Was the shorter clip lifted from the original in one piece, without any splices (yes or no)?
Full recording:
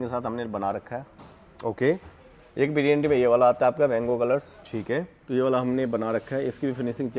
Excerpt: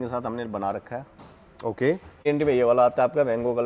no